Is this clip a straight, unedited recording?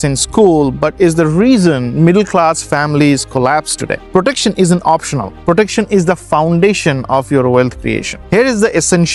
yes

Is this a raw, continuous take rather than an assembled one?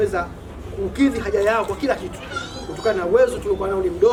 yes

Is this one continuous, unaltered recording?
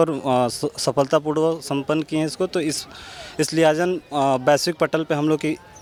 yes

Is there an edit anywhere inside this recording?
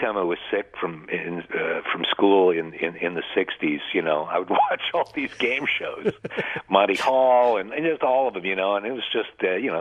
no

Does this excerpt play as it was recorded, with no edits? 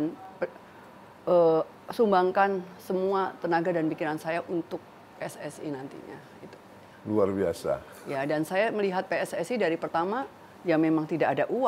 yes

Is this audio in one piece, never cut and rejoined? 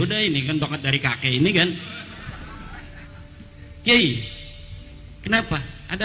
yes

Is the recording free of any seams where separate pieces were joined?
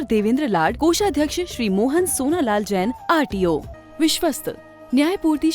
no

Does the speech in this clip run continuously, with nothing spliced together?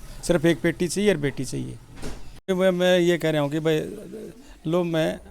no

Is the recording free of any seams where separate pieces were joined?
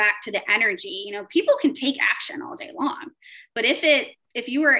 yes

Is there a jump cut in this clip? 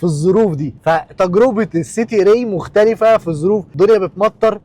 yes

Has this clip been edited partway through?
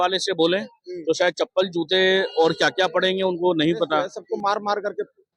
yes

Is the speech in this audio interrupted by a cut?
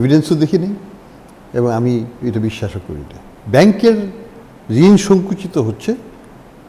no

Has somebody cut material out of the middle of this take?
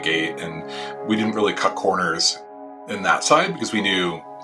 yes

